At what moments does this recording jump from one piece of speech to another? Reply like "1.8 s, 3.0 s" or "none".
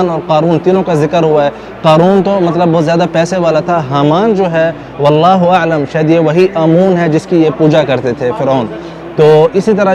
none

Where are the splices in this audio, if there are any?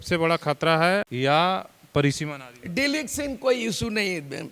1.1 s

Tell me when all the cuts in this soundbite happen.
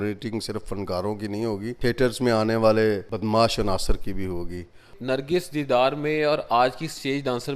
1.7 s, 3.1 s, 4.9 s

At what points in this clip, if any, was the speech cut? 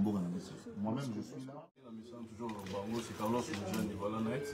1.7 s

